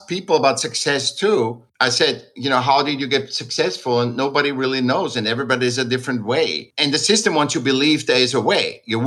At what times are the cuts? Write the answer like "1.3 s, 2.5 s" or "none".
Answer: 1.6 s